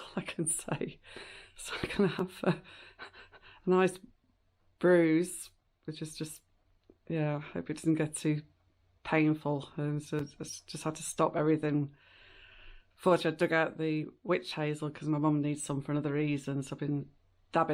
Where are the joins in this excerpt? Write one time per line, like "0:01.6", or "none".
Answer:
none

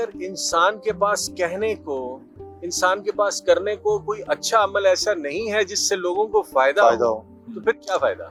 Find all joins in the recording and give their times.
none

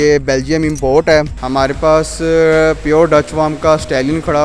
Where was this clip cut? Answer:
0:01.4

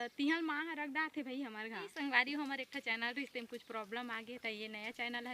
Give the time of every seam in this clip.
0:01.9

